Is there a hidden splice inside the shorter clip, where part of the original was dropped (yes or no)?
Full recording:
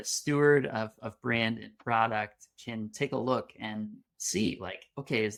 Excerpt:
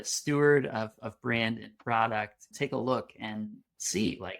yes